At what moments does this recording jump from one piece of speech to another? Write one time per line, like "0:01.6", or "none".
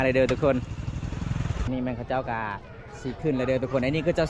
0:01.6